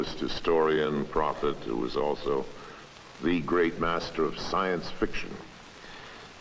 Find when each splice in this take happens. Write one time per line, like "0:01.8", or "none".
0:04.2